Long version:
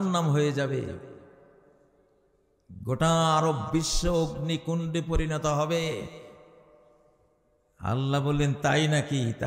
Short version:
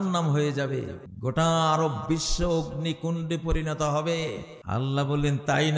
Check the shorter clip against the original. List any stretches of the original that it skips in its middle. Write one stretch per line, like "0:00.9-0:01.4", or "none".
0:01.0-0:02.7
0:06.2-0:07.7